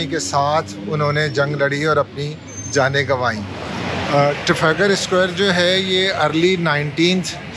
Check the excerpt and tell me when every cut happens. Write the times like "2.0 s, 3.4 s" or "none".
3.7 s